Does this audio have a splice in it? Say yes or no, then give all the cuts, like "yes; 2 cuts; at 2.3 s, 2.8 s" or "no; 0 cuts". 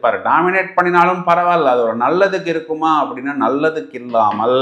no; 0 cuts